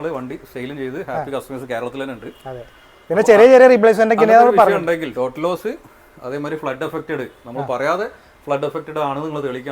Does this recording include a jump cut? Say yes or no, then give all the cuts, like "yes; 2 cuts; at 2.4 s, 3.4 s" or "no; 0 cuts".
no; 0 cuts